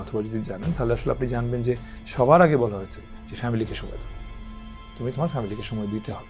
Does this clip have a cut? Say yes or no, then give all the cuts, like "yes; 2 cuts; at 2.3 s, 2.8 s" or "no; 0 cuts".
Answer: no; 0 cuts